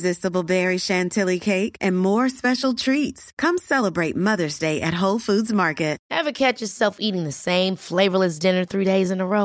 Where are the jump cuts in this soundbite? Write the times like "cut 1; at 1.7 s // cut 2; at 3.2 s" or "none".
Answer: cut 1; at 6.0 s